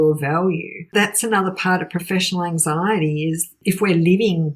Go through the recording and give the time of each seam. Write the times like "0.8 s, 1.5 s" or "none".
0.9 s, 3.5 s